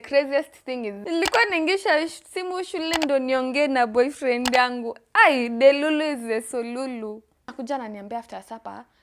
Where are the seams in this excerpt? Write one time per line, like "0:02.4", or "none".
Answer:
0:00.9
0:07.5